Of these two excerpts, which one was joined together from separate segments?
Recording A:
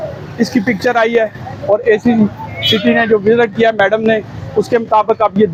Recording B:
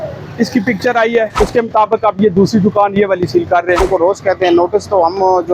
B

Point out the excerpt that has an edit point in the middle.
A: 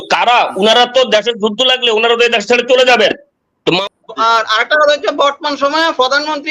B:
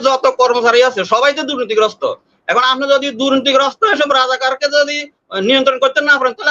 A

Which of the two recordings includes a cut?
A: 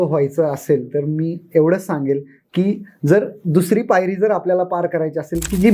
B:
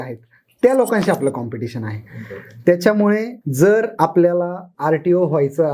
B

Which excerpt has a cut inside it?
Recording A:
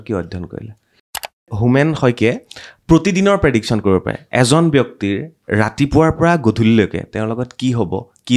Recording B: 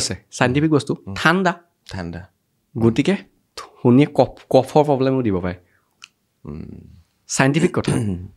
A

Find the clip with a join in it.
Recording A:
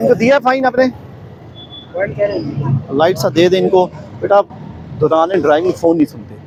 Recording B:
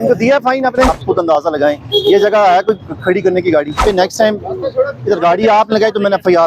B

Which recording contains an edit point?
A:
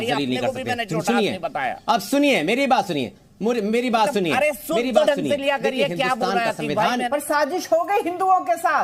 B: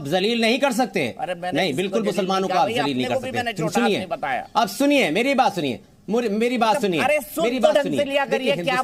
A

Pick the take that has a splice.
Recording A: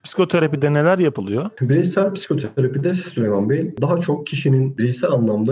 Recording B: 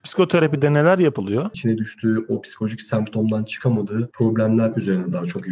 B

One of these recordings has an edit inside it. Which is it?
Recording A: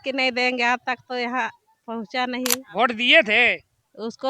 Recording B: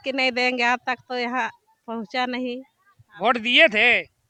A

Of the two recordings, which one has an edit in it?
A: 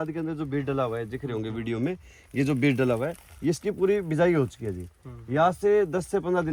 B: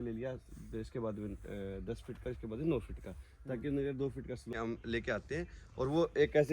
B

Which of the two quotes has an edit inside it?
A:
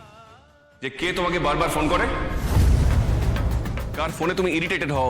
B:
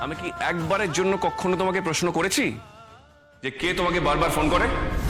A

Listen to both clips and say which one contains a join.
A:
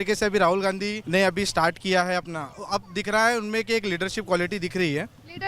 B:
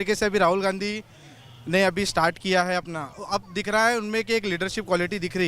A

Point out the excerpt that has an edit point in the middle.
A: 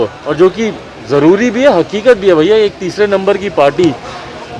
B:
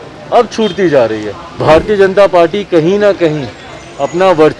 B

